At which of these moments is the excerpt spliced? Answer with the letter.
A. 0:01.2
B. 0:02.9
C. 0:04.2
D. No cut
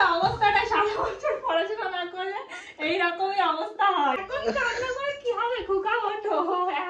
C